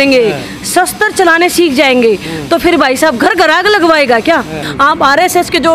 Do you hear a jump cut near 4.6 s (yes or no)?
yes